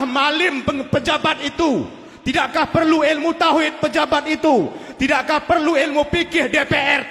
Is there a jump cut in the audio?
no; 0 cuts

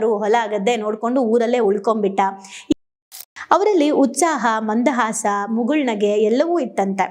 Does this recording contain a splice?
yes; 1 cut; at 2.7 s

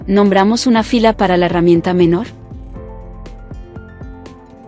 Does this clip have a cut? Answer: yes; 1 cut; at 2.3 s

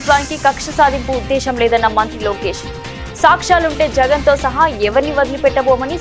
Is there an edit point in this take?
no; 0 cuts

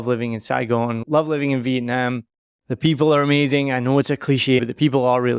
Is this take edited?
yes; 2 cuts; at 1.0 s, 4.6 s

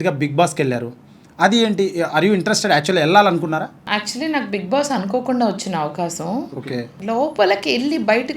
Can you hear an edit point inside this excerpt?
yes; 2 cuts; at 3.8 s, 6.9 s

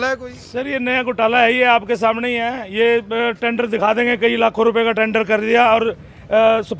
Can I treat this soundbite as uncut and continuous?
yes; 0 cuts

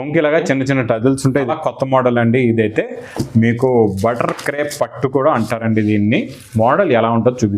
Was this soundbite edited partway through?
yes; 1 cut; at 1.5 s

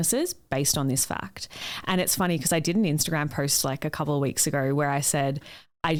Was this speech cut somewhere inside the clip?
no; 0 cuts

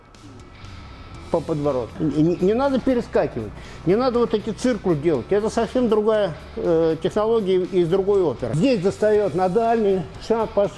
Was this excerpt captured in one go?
no; 2 cuts; at 1.9 s, 8.5 s

